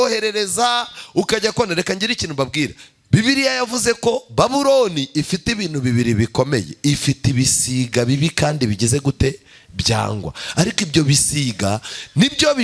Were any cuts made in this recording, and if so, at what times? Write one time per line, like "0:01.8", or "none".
none

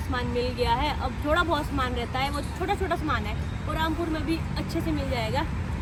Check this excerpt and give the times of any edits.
none

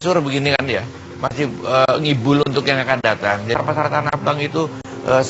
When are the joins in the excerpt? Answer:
none

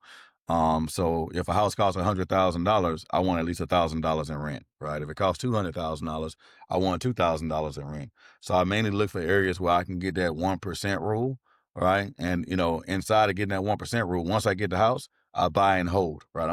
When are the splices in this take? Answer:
none

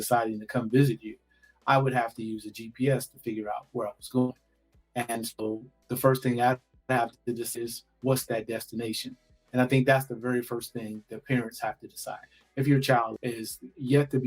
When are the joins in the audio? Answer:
0:13.2

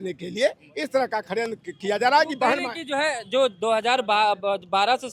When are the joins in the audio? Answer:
none

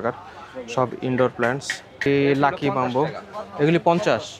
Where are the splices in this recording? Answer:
0:02.1

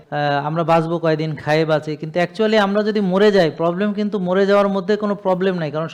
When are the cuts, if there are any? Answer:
none

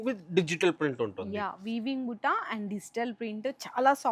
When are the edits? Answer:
none

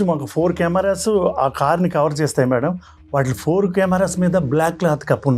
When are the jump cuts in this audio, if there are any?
none

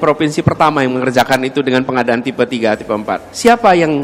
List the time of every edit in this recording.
none

